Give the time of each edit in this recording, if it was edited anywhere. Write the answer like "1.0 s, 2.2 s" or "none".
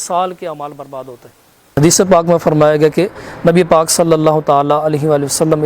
1.8 s

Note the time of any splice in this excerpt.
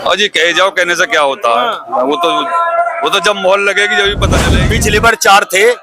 4.6 s

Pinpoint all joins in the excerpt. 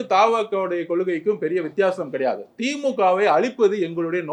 none

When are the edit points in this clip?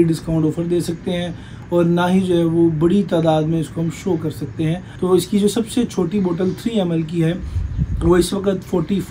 4.9 s

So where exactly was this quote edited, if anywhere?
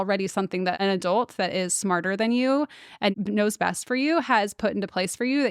0.7 s, 3.1 s

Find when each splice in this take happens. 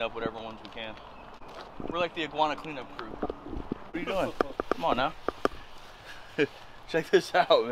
1.4 s, 3.8 s

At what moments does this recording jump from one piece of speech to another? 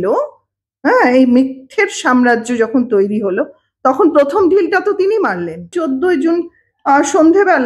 5.7 s

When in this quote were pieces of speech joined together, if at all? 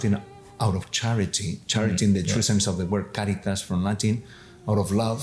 none

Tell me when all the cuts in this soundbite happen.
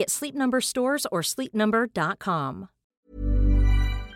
2.9 s

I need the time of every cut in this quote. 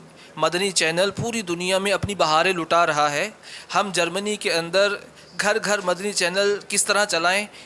none

